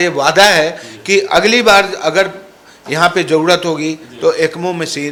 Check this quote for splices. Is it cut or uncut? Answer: uncut